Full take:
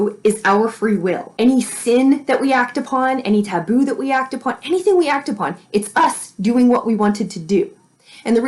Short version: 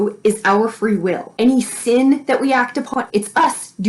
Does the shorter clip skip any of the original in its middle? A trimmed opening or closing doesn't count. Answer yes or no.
yes